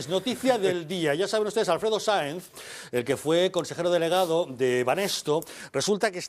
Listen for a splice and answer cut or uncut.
uncut